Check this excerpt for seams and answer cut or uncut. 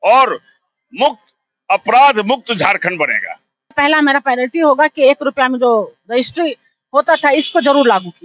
cut